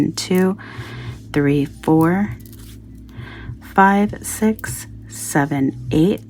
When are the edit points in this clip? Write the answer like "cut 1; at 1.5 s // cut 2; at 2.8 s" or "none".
none